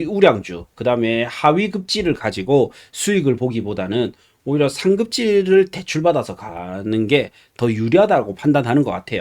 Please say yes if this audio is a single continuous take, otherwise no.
yes